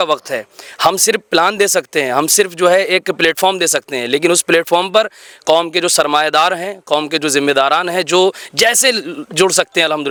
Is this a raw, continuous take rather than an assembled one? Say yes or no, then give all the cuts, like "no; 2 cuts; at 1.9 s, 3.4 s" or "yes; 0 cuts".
yes; 0 cuts